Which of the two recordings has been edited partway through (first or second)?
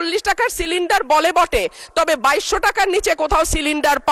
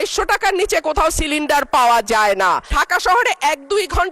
second